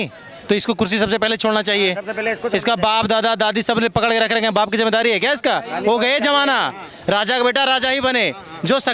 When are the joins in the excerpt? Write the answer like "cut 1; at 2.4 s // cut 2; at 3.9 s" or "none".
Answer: none